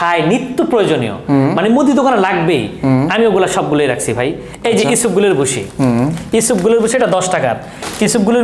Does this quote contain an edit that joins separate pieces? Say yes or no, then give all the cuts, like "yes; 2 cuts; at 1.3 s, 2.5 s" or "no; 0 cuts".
no; 0 cuts